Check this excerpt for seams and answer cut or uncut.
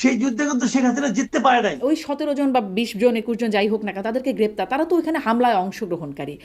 cut